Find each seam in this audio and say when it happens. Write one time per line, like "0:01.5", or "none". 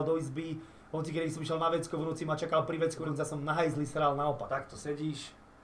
0:03.0
0:04.5